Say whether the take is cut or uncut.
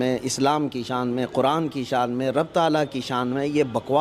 uncut